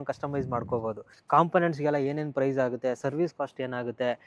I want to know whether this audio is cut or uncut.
cut